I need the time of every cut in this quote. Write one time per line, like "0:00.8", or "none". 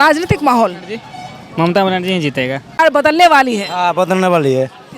0:02.7